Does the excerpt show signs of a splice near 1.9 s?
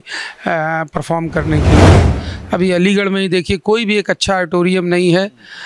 yes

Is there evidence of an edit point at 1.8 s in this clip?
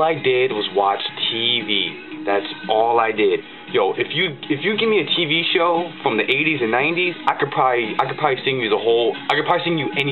no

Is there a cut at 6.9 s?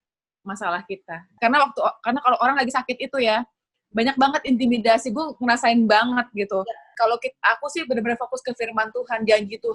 yes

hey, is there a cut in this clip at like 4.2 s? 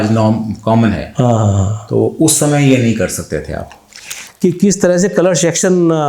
yes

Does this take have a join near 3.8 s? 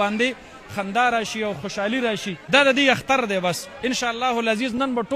no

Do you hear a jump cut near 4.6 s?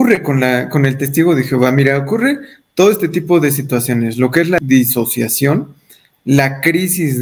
yes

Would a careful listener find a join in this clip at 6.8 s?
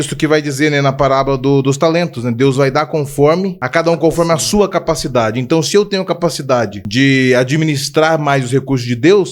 yes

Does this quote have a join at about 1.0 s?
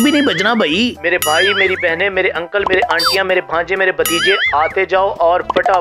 yes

